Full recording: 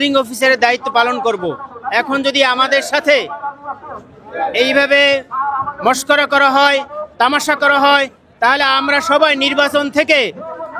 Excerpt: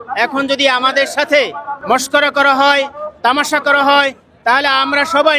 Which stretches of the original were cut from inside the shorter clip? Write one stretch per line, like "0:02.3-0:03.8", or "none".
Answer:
0:03.5-0:05.7